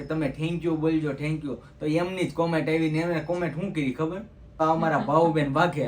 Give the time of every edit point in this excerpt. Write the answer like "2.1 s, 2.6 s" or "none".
4.6 s